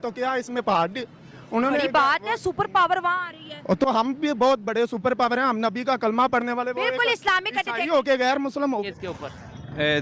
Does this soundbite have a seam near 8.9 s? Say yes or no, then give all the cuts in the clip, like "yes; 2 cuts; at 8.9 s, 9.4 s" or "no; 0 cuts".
yes; 1 cut; at 8.9 s